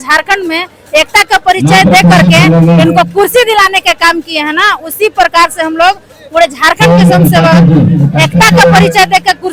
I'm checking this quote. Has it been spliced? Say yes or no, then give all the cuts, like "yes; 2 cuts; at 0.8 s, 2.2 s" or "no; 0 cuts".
no; 0 cuts